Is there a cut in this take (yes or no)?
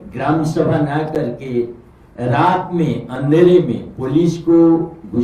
no